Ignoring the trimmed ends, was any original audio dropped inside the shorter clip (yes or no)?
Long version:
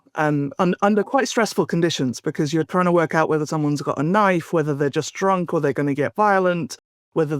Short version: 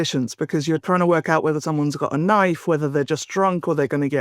no